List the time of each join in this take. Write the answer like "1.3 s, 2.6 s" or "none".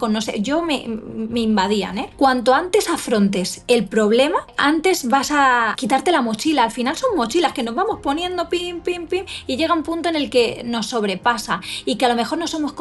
2.0 s, 4.5 s, 5.8 s